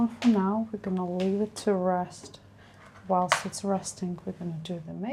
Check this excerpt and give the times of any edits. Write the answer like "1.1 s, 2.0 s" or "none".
none